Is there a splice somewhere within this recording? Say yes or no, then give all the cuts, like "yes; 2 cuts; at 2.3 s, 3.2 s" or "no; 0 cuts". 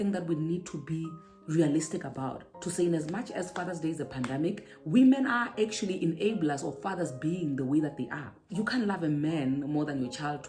yes; 2 cuts; at 4.7 s, 8.5 s